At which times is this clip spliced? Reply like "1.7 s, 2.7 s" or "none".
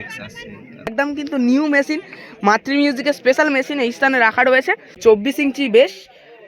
0.9 s, 5.0 s